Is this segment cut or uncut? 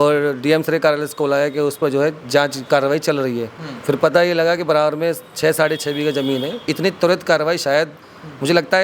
cut